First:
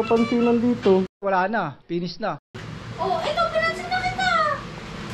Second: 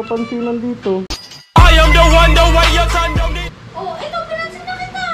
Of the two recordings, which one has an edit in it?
second; 2 cuts; at 1.2 s, 3.2 s

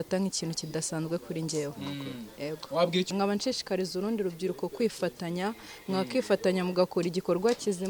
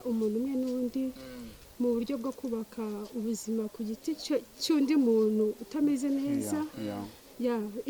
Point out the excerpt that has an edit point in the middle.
first; 1 cut; at 3.1 s

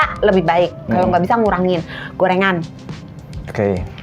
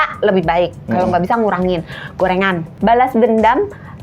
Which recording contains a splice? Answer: second; 1 cut; at 2.7 s

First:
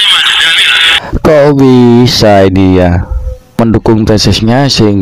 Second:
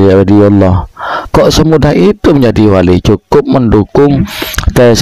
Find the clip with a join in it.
first; 2 cuts; at 1.1 s, 3.6 s

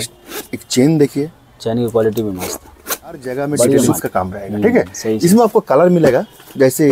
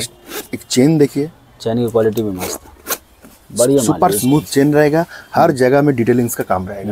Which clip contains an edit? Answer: first; 1 cut; at 4.0 s

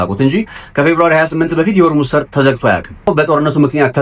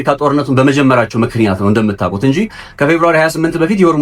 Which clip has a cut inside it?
first; 1 cut; at 3.1 s

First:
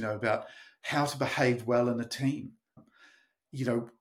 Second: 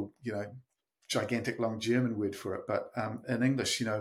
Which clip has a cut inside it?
first; 1 cut; at 2.8 s

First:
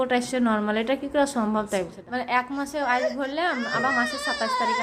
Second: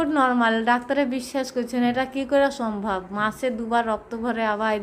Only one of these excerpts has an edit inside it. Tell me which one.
first; 1 cut; at 2.0 s

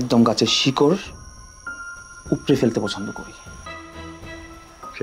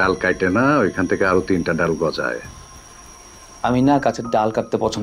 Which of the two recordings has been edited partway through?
first; 1 cut; at 3.7 s

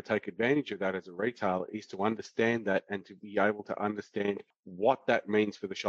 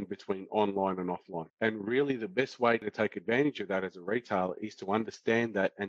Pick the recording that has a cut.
second; 1 cut; at 1.4 s

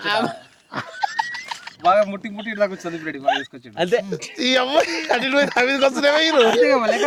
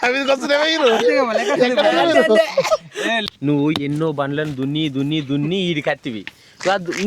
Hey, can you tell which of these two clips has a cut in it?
second; 1 cut; at 3.3 s

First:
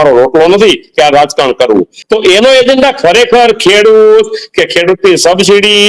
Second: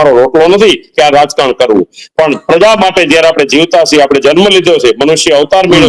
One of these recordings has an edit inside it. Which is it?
first; 1 cut; at 2.0 s

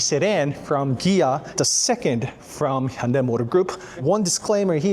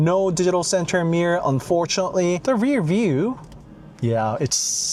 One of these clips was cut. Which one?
first; 1 cut; at 3.9 s

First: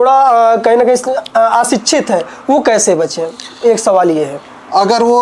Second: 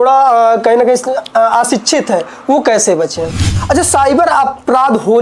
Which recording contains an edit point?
second; 1 cut; at 3.4 s

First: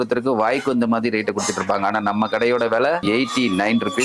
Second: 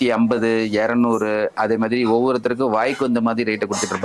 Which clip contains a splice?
first; 1 cut; at 3.0 s

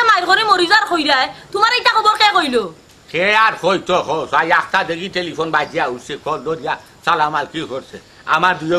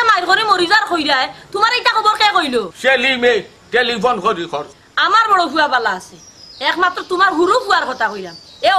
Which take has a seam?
second; 2 cuts; at 2.7 s, 4.6 s

